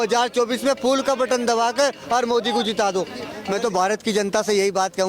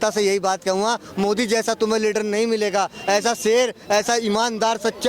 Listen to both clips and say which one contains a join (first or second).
first